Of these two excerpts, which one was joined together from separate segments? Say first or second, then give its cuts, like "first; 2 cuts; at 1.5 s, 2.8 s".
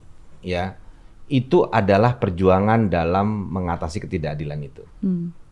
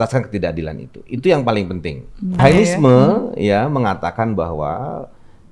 second; 1 cut; at 2.4 s